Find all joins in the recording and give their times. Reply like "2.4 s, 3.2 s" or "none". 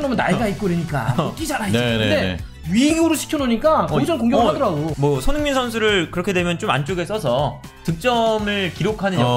4.9 s